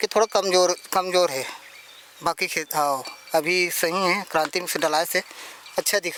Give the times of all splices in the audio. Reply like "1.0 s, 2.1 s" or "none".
none